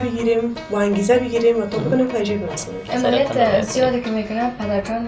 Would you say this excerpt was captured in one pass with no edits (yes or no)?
no